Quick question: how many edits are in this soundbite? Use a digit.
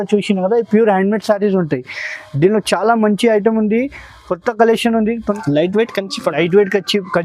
1